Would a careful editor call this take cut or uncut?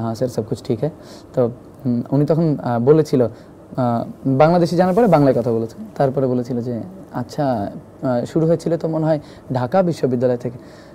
uncut